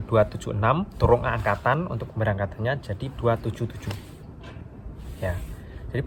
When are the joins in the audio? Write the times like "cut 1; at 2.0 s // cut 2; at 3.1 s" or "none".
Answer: none

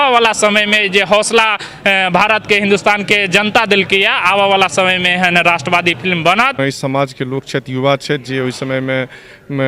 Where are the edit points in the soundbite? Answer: cut 1; at 6.6 s

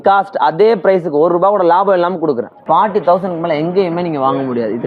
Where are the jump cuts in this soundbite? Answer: cut 1; at 2.5 s

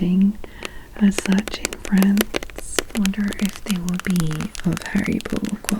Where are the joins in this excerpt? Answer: cut 1; at 2.9 s

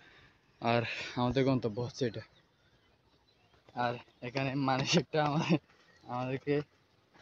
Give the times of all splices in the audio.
cut 1; at 3.7 s

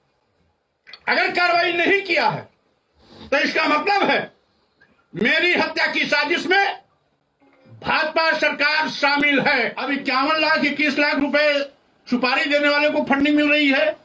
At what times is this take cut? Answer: cut 1; at 9.8 s

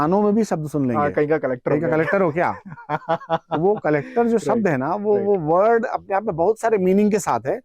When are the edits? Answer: none

